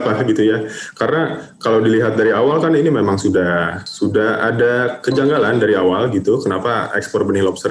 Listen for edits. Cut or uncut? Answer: cut